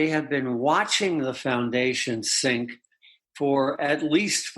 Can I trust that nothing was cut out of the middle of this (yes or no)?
yes